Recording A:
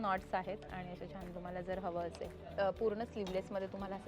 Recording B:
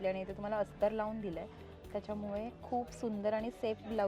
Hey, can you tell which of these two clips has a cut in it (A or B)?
A